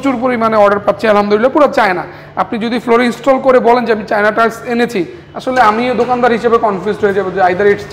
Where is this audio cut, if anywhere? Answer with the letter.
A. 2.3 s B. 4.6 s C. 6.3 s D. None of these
D